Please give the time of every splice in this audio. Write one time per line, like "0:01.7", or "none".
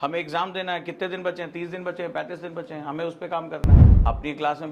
0:03.8